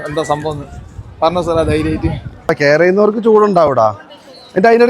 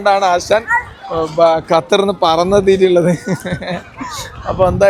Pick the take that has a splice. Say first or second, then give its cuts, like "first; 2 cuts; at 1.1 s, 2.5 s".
first; 1 cut; at 2.5 s